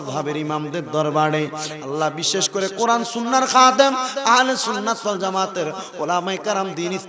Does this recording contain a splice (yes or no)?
no